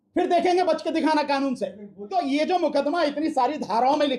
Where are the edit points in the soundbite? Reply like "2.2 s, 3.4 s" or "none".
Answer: 2.1 s